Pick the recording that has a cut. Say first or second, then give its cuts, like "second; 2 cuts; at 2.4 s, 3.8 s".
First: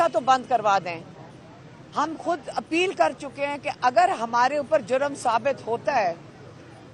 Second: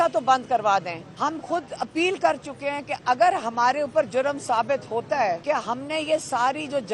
second; 2 cuts; at 1.0 s, 5.4 s